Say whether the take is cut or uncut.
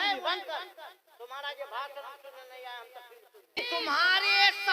cut